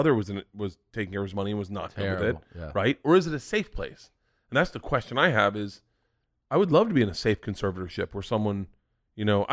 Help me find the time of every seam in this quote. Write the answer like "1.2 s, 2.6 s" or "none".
none